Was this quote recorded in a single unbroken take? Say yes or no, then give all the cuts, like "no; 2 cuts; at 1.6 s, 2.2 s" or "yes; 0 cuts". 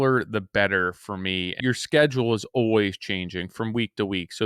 no; 1 cut; at 1.6 s